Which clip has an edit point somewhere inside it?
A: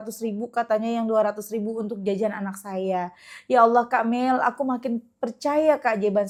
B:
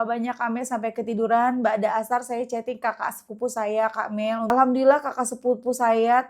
B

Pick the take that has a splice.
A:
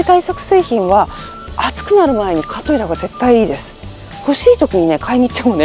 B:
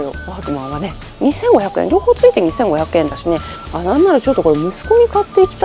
B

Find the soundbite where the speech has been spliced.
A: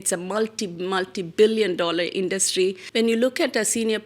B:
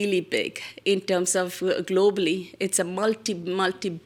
A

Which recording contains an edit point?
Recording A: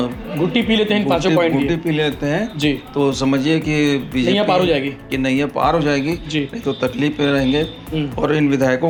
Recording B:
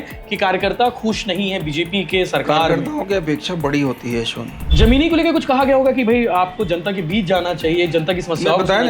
B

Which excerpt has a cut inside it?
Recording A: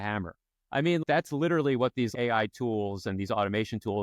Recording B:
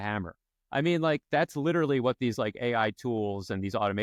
A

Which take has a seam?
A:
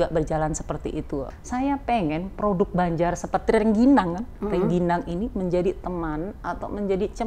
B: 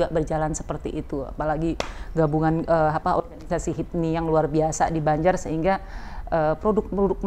A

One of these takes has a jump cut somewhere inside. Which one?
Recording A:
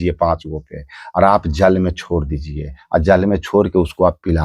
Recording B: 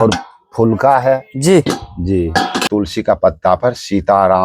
B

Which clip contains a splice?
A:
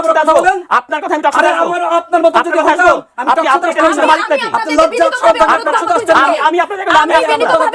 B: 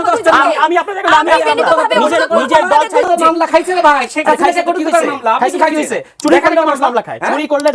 B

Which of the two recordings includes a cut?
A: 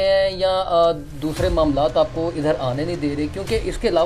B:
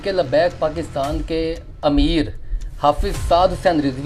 B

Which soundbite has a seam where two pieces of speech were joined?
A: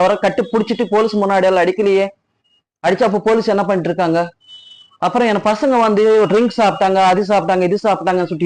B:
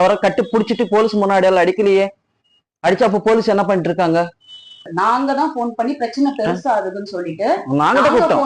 B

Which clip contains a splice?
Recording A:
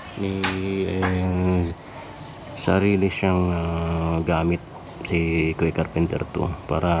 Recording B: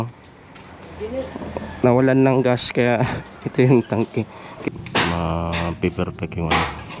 B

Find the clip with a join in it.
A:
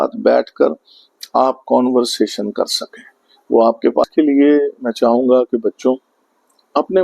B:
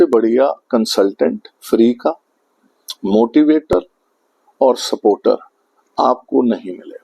A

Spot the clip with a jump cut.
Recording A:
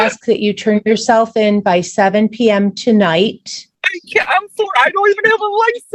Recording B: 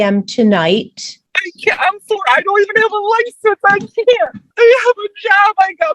B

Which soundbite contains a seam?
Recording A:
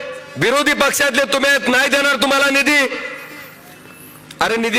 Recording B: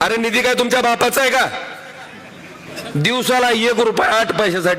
B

